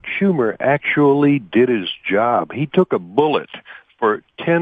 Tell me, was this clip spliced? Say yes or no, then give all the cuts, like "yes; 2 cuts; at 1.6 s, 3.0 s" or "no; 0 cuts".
no; 0 cuts